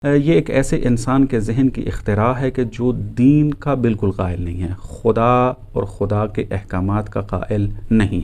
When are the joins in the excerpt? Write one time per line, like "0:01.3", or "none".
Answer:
none